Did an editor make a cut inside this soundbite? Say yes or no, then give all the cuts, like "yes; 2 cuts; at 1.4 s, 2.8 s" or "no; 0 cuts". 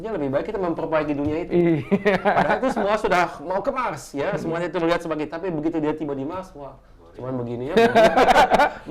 no; 0 cuts